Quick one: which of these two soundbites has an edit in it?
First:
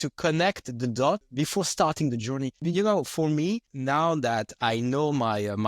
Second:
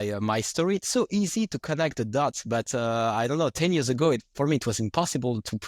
first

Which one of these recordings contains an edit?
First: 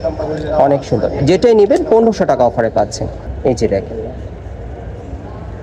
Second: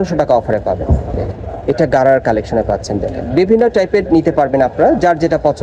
first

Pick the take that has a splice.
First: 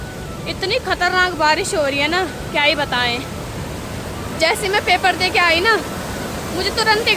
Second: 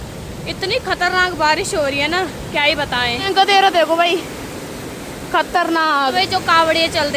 second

